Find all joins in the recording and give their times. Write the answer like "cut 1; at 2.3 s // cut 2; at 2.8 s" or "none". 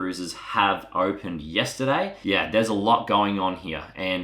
cut 1; at 2.2 s